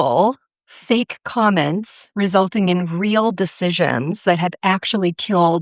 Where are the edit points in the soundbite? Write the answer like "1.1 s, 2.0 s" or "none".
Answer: none